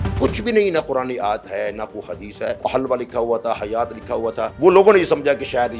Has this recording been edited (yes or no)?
yes